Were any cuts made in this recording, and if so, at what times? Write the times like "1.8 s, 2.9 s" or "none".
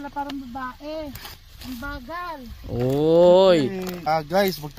1.4 s, 3.9 s

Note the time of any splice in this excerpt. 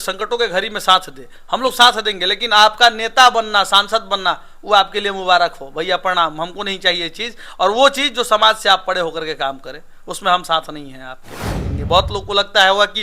11.6 s

